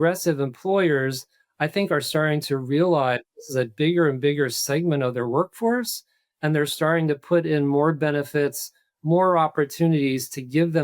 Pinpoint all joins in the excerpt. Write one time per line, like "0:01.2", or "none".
none